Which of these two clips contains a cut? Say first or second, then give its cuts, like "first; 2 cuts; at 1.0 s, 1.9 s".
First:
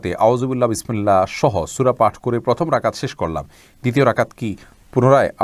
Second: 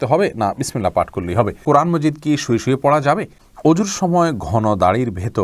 second; 2 cuts; at 1.6 s, 3.4 s